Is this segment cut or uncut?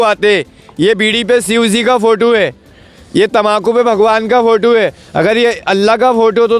uncut